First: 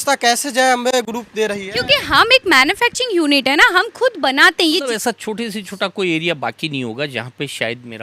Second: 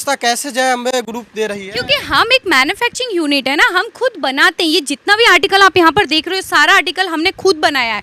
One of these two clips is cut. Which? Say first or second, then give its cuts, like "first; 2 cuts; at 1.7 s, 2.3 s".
first; 1 cut; at 4.9 s